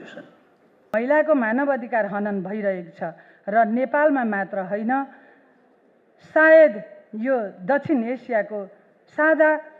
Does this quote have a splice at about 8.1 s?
no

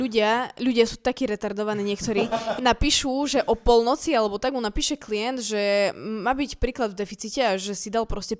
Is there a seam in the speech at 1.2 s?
no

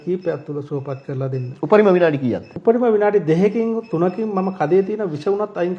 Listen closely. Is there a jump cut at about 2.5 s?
yes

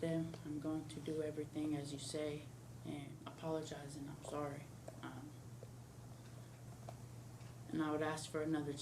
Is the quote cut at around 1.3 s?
no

